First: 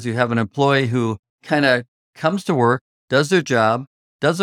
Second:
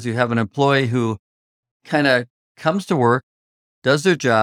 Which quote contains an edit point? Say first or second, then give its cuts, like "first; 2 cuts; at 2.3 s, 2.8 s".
first; 2 cuts; at 1.3 s, 2.9 s